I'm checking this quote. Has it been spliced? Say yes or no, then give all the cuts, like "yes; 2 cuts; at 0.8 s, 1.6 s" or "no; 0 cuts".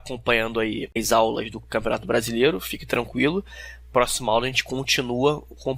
no; 0 cuts